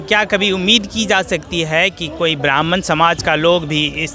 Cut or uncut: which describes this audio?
uncut